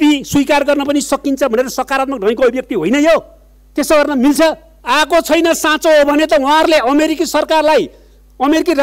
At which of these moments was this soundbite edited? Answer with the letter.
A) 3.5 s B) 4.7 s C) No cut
B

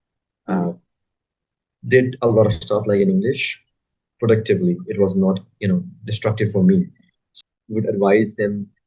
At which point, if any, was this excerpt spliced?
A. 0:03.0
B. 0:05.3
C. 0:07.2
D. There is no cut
C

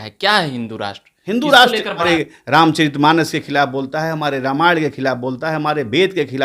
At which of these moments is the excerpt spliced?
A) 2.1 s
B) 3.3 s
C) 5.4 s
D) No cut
A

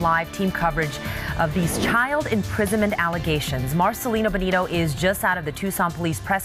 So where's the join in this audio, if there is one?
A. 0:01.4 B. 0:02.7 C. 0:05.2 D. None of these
B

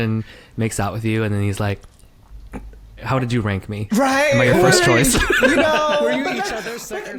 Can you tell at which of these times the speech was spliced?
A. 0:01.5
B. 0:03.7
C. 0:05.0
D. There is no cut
D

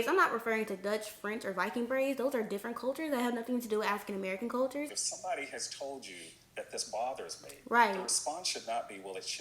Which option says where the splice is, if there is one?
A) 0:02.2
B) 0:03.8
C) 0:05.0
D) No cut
C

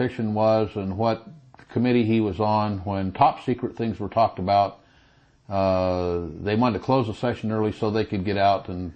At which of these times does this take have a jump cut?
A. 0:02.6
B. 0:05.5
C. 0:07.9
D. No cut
D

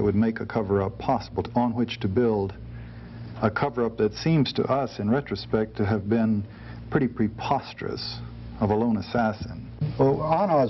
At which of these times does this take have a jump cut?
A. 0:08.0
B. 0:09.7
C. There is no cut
B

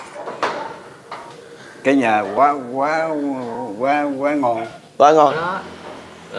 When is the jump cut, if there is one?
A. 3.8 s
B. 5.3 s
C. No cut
B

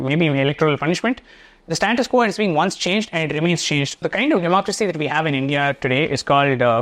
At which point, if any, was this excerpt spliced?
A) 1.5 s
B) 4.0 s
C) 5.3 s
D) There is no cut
B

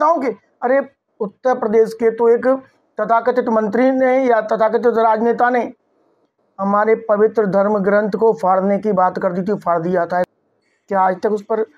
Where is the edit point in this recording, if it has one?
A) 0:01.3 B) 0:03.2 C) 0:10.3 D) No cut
C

